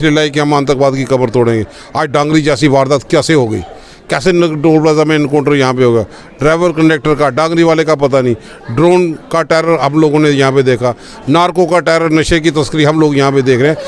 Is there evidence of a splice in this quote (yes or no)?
no